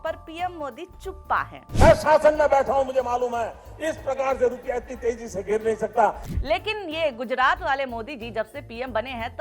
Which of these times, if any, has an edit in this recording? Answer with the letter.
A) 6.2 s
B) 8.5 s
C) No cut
A